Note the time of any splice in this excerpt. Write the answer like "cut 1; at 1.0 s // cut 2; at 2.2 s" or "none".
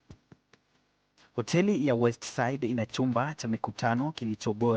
cut 1; at 1.9 s